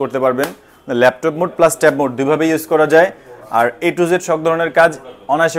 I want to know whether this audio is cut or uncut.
uncut